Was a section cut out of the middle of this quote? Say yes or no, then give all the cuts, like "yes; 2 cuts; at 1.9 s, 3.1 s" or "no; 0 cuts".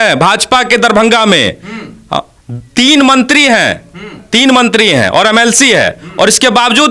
no; 0 cuts